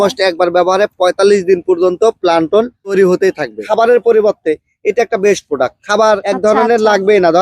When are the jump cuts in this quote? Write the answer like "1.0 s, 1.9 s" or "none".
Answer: 3.6 s